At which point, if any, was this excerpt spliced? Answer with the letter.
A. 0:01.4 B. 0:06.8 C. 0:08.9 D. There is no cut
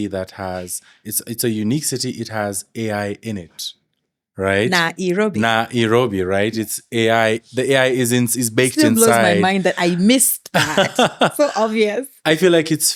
D